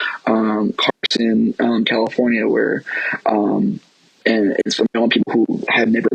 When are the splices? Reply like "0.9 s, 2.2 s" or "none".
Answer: none